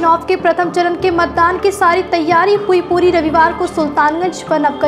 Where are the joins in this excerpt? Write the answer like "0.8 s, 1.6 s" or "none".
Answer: none